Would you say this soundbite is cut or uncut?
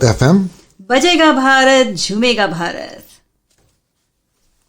cut